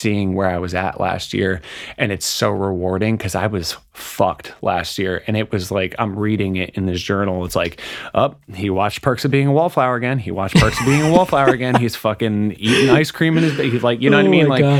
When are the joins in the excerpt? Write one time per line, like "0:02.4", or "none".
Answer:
none

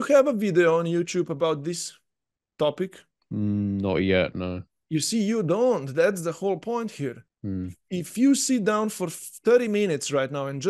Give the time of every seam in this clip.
none

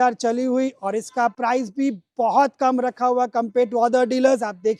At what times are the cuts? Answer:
none

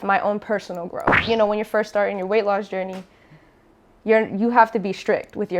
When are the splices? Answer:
0:01.2

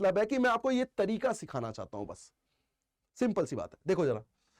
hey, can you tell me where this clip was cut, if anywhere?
none

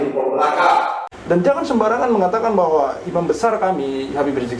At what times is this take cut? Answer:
0:01.1

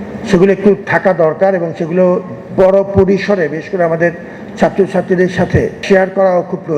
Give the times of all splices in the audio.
0:05.8

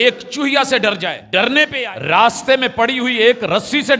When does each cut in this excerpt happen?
0:01.7

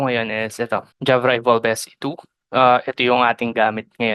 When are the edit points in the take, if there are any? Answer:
0:00.9

